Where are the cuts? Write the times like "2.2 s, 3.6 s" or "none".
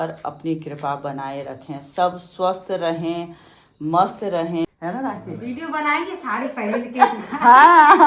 4.6 s